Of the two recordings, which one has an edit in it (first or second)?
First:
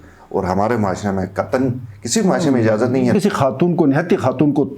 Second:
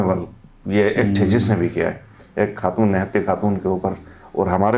first